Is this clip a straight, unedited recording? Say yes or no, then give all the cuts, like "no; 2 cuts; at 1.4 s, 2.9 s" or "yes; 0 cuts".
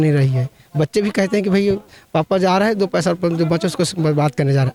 yes; 0 cuts